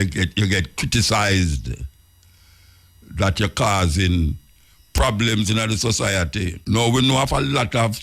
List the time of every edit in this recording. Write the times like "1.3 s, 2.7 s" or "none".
6.6 s